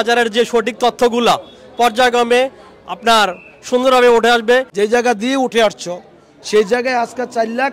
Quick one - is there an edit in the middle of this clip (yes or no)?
yes